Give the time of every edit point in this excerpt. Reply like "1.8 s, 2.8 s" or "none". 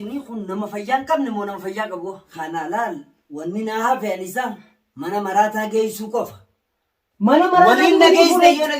2.3 s